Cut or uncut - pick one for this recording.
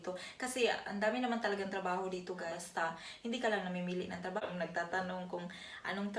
cut